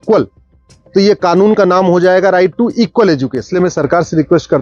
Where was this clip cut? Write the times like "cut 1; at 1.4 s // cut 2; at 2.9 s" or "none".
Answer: cut 1; at 3.4 s